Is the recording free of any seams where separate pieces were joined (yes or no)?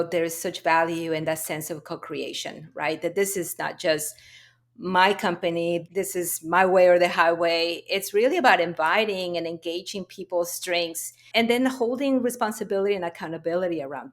no